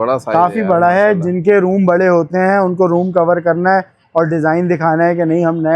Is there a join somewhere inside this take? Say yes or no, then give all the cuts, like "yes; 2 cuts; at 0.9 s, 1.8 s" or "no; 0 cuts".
no; 0 cuts